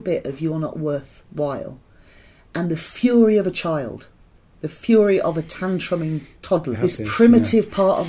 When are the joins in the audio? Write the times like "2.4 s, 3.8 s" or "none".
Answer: 6.8 s